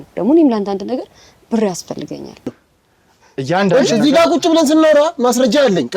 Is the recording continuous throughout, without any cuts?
no; 1 cut; at 2.6 s

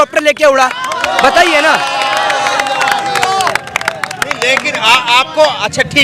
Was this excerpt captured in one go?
yes; 0 cuts

